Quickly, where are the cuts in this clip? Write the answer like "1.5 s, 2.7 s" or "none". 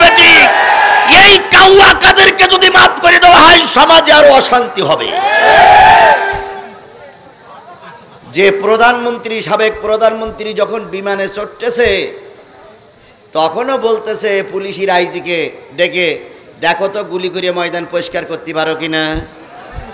none